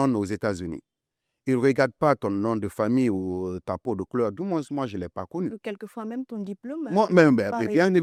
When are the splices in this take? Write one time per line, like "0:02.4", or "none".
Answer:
none